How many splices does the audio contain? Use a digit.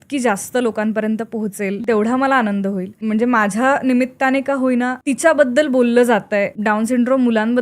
4